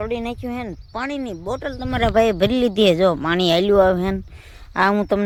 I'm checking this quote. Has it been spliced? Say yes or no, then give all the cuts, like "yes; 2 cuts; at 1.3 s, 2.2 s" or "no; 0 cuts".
no; 0 cuts